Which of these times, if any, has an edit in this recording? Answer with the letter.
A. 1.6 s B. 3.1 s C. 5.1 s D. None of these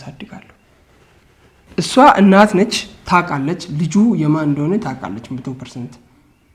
A